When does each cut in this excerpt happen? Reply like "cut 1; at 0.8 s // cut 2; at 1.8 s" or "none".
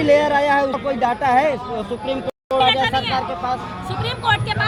none